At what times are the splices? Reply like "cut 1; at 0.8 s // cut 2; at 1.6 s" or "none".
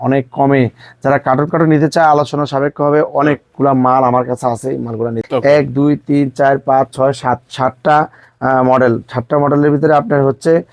cut 1; at 5.2 s